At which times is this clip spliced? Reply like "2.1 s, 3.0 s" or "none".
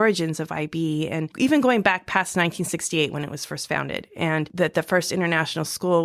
1.3 s, 4.5 s

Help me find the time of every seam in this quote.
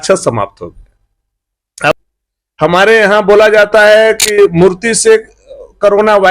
2.0 s

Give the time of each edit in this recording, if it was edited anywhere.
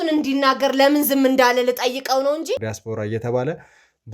2.7 s

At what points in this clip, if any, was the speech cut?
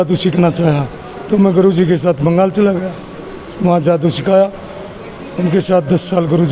none

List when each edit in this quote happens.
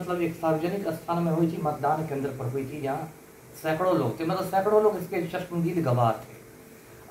none

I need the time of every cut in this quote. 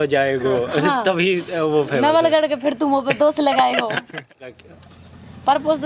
4.6 s

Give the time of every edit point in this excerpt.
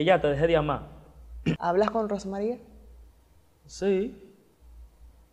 1.6 s

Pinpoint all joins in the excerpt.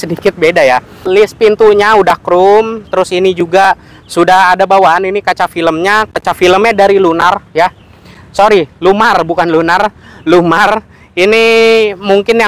1.0 s

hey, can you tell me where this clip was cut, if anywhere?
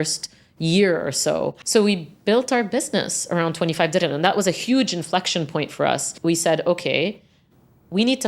1.6 s

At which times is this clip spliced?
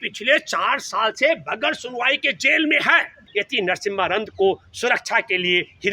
3.2 s

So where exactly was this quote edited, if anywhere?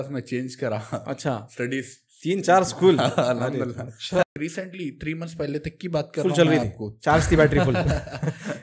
4.2 s

